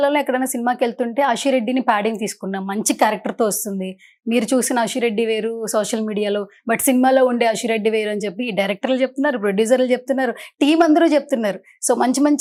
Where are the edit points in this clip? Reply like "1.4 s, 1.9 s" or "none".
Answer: none